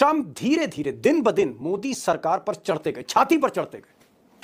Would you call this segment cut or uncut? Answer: uncut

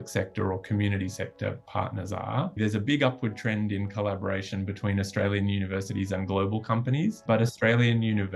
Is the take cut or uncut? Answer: cut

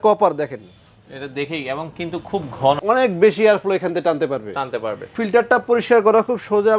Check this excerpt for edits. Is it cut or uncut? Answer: cut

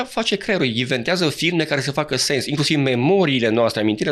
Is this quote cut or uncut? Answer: uncut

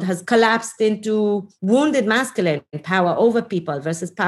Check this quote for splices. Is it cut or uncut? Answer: cut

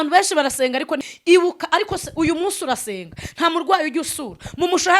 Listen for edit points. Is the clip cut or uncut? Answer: cut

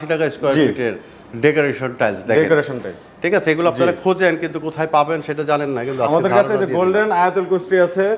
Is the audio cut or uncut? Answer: uncut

